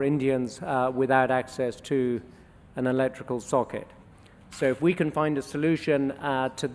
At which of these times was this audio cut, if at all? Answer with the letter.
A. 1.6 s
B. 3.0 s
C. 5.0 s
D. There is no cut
C